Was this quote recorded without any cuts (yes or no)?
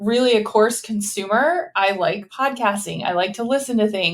yes